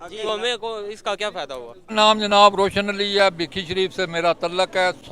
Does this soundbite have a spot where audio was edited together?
yes; 1 cut; at 1.9 s

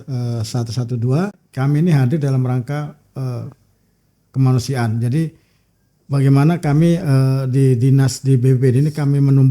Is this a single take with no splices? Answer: no; 1 cut; at 1.4 s

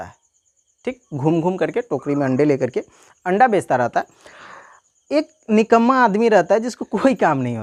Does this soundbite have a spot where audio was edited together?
no; 0 cuts

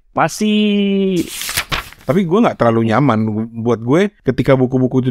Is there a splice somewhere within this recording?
yes; 2 cuts; at 1.5 s, 4.2 s

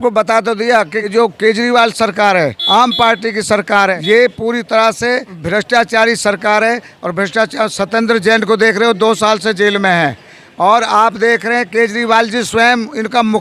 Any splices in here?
yes; 4 cuts; at 1.1 s, 2.6 s, 4.0 s, 5.3 s

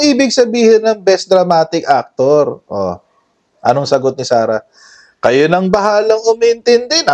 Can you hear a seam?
no; 0 cuts

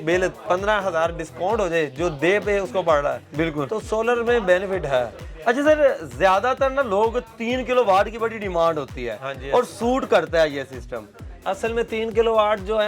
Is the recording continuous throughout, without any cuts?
yes; 0 cuts

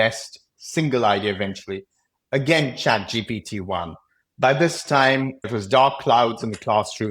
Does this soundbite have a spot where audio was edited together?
yes; 1 cut; at 5.5 s

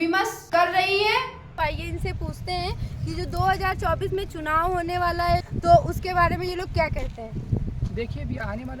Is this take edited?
yes; 1 cut; at 1.5 s

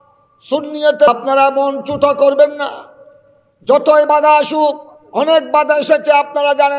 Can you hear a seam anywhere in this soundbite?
yes; 1 cut; at 1.1 s

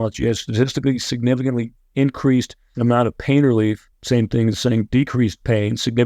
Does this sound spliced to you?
yes; 2 cuts; at 2.6 s, 3.9 s

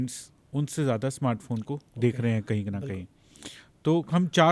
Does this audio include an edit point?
no; 0 cuts

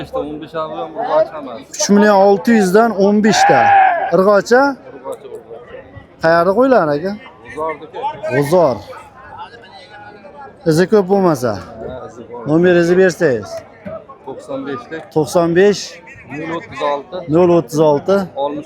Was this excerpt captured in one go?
yes; 0 cuts

